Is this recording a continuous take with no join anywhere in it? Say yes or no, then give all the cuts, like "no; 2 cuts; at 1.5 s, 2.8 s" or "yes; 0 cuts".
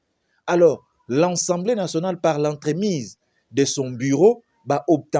yes; 0 cuts